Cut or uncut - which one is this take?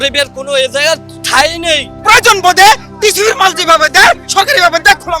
cut